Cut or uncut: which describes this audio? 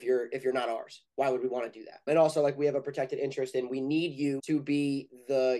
cut